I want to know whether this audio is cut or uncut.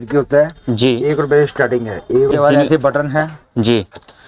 cut